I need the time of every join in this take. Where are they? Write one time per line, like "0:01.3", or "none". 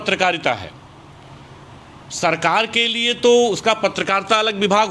none

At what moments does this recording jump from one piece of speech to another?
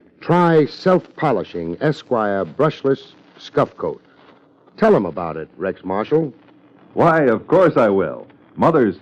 0:06.9

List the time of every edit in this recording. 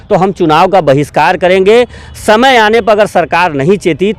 none

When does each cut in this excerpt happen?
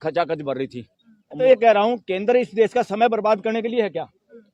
0:01.4

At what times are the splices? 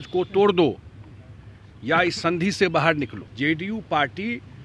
0:03.2

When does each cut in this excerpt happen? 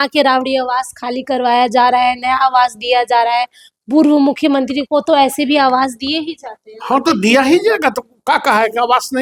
none

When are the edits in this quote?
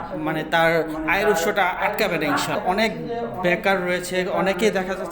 0:02.6

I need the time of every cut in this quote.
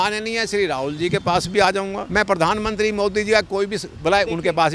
0:02.0

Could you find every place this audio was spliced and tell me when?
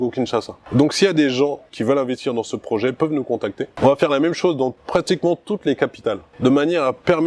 0:01.7
0:03.7
0:04.8
0:06.3

